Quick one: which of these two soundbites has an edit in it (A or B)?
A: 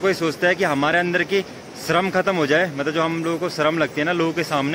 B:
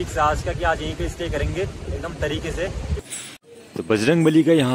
B